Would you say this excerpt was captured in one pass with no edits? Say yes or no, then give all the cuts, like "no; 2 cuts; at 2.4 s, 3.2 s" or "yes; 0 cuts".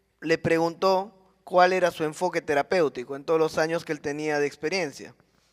no; 1 cut; at 2.3 s